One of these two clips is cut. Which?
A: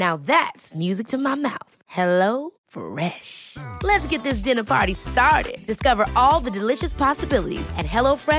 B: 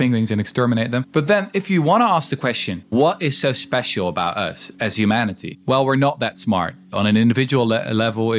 B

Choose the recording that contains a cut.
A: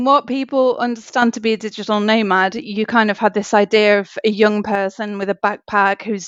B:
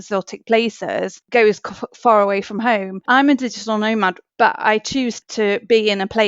B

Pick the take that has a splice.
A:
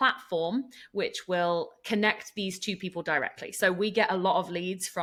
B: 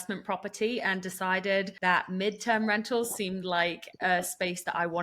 B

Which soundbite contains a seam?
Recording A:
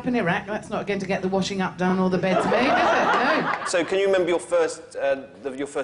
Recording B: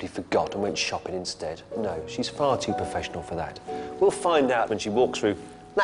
A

